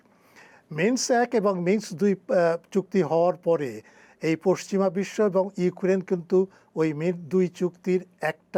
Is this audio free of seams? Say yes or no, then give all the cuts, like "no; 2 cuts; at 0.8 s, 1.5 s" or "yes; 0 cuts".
yes; 0 cuts